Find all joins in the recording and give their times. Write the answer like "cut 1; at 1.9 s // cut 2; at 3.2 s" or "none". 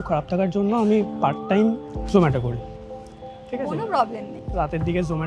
none